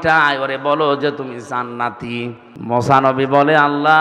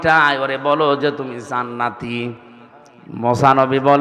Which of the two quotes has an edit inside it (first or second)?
first